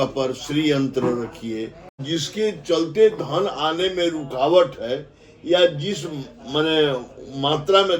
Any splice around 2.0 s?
yes; 1 cut; at 2.0 s

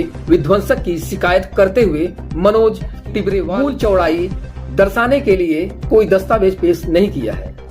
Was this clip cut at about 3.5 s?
yes; 1 cut; at 3.5 s

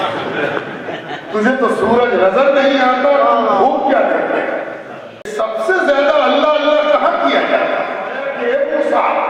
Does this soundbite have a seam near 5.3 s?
yes; 2 cuts; at 5.3 s, 8.2 s

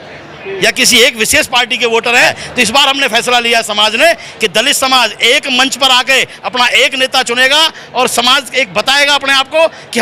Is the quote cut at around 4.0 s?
no; 1 cut; at 2.4 s

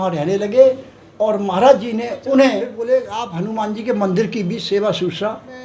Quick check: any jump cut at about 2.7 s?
yes; 1 cut; at 2.7 s

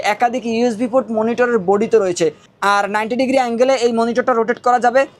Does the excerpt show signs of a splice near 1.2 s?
no; 0 cuts

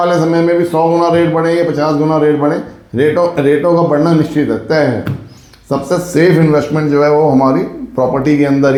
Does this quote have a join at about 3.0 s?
no; 0 cuts

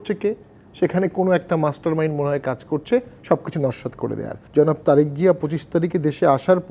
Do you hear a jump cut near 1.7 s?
no; 1 cut; at 4.3 s

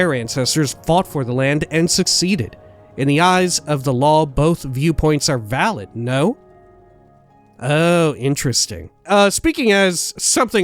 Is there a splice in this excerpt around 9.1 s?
yes; 1 cut; at 9.1 s

